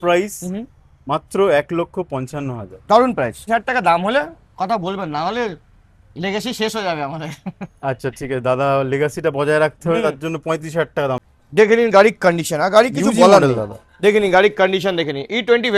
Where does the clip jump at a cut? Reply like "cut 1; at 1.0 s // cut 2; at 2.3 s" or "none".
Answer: cut 1; at 3.4 s // cut 2; at 11.2 s

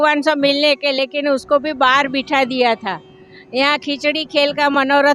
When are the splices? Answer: none

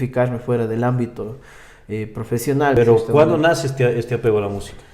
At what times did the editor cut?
cut 1; at 2.8 s

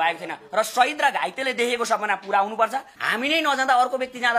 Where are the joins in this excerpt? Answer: cut 1; at 3.0 s

